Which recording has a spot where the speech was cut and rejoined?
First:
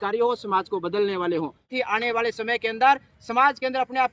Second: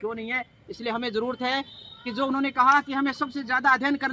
first; 1 cut; at 1.7 s

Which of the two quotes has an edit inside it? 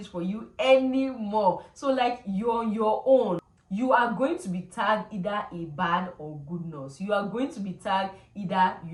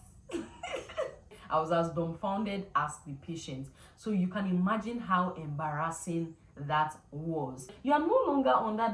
second; 2 cuts; at 1.3 s, 7.7 s

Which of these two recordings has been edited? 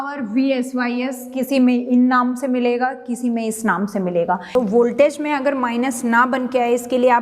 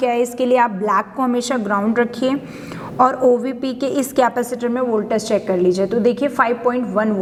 first; 1 cut; at 4.5 s

